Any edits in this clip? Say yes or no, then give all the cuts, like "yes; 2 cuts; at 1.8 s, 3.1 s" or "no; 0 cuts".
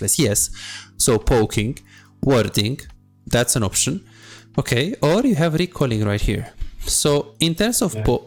no; 0 cuts